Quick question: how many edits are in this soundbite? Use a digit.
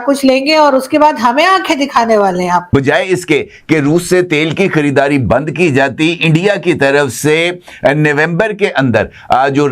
1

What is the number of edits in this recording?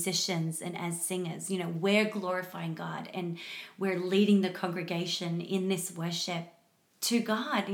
0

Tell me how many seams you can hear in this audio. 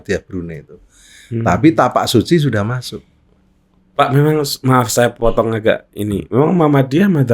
0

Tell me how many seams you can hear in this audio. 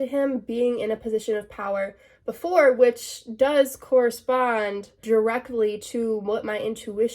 1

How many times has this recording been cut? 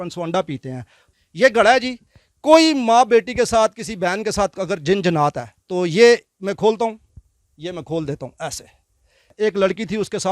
2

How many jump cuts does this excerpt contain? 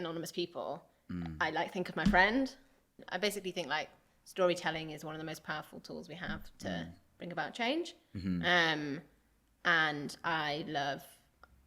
1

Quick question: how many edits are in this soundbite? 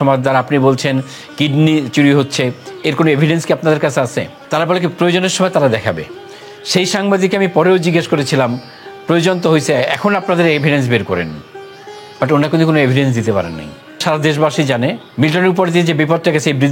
3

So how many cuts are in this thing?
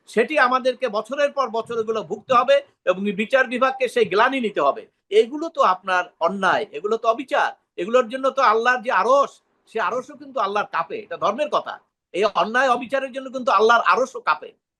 1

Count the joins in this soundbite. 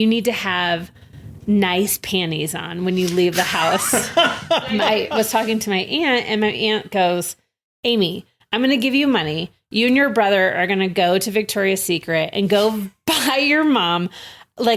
1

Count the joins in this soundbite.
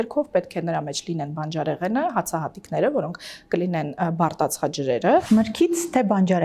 1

